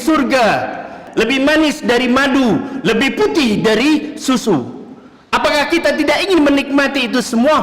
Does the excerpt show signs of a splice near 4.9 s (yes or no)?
no